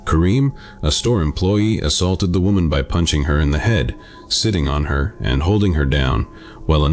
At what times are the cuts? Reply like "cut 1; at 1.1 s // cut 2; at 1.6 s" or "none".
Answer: cut 1; at 3.1 s